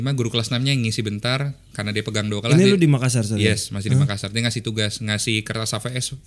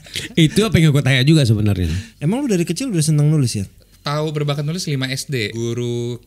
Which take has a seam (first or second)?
second